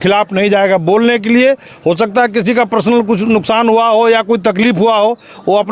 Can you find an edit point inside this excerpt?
no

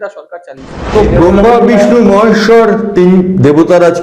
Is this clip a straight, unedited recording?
no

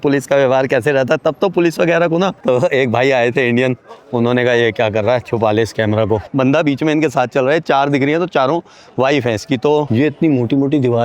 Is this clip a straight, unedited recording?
no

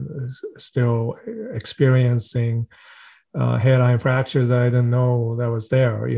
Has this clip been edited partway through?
no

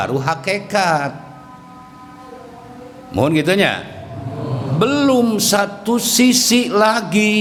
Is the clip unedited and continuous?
yes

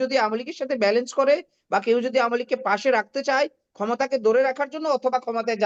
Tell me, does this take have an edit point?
no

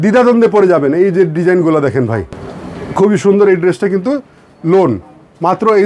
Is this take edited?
yes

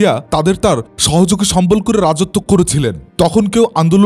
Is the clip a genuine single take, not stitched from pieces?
no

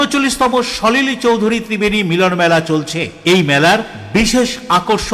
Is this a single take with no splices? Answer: yes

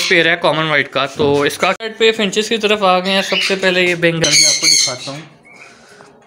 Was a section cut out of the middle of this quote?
yes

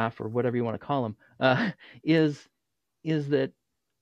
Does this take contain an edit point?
no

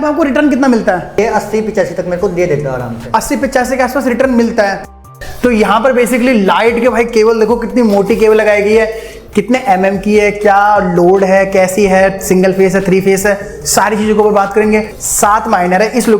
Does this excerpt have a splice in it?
yes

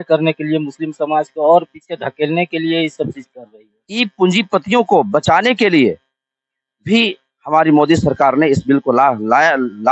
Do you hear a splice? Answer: yes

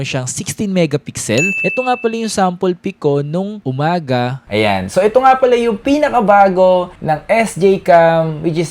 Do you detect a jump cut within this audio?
yes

